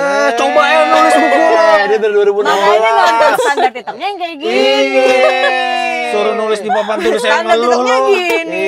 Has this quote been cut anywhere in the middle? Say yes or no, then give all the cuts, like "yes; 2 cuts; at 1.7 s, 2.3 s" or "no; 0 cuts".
no; 0 cuts